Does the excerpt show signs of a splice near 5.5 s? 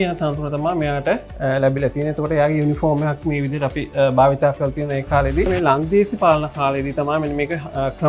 yes; 1 cut; at 5.5 s

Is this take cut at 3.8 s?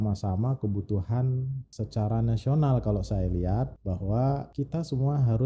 yes; 3 cuts; at 1.6 s, 3.8 s, 4.5 s

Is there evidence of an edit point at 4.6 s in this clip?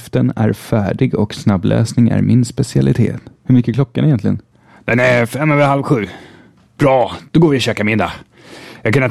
yes; 1 cut; at 4.6 s

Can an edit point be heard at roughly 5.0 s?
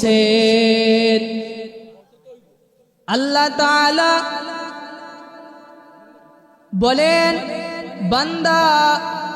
no; 1 cut; at 1.8 s

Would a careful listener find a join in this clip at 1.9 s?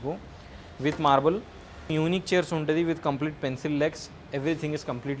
yes; 1 cut; at 1.9 s

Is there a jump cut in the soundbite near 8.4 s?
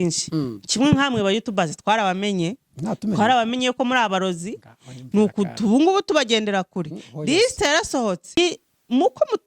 yes; 1 cut; at 8.4 s

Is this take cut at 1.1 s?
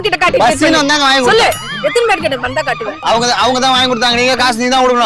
no; 1 cut; at 3.0 s

